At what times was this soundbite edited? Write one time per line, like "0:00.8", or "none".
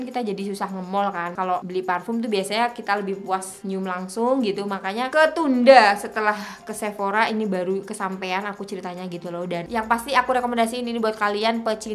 0:01.4
0:03.5
0:05.1
0:09.6